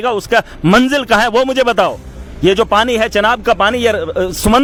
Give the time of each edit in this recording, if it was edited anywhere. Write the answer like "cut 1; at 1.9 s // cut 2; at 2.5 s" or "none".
none